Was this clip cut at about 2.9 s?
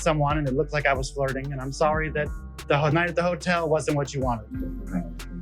no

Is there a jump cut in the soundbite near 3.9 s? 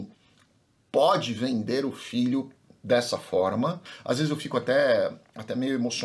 yes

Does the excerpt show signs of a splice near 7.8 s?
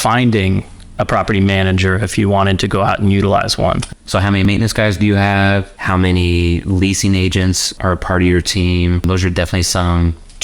yes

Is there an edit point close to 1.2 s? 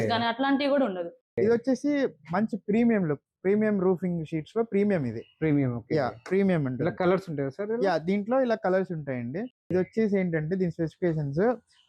yes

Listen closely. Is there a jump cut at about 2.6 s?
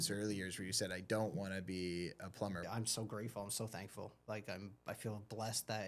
yes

